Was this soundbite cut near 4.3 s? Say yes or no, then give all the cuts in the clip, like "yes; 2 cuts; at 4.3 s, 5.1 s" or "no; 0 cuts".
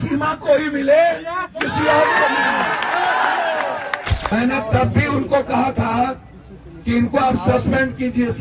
yes; 1 cut; at 4.3 s